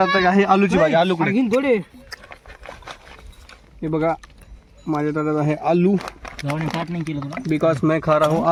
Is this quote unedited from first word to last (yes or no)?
yes